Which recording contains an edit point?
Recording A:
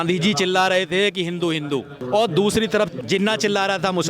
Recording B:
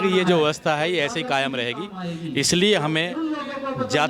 A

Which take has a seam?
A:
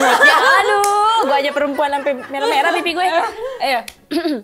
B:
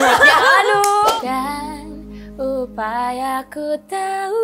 B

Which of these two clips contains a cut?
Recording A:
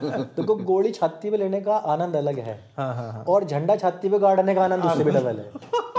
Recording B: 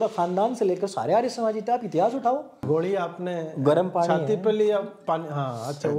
B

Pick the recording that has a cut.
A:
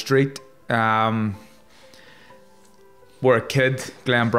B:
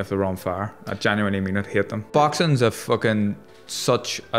B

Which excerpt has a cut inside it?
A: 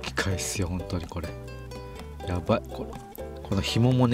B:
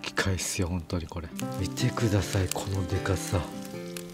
B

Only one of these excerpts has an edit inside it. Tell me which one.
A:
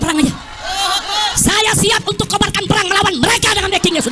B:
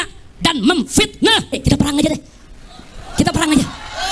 B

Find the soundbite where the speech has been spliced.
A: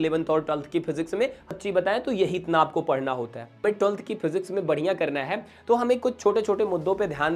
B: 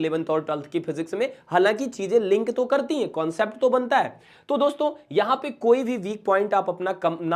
A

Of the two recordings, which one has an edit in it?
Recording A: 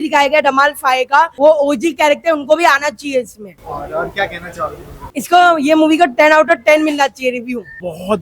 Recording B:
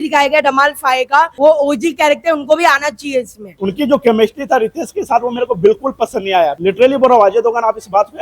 B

